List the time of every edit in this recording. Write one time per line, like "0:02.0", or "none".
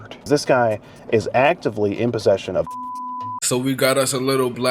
0:03.3